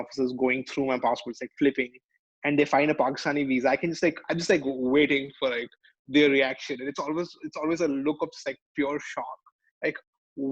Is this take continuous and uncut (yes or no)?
yes